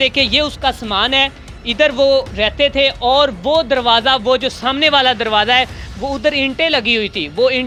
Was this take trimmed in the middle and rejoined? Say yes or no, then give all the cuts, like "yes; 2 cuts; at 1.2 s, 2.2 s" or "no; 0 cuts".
no; 0 cuts